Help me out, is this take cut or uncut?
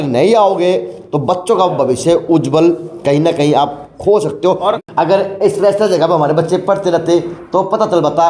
cut